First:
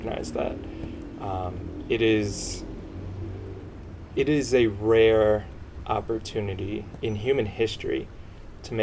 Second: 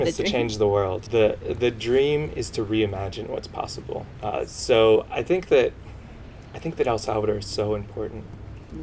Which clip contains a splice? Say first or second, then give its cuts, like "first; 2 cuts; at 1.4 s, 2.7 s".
second; 2 cuts; at 1.0 s, 4.1 s